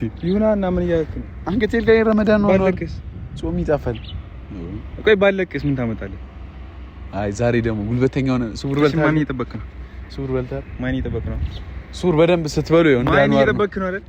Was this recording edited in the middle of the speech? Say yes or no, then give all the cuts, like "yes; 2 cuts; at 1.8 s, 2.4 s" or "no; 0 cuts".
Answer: no; 0 cuts